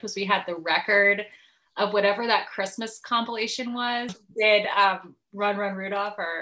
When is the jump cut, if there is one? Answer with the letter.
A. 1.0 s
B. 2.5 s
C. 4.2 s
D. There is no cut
C